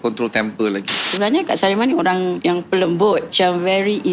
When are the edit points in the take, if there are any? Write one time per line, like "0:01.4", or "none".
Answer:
0:01.1
0:02.4
0:03.3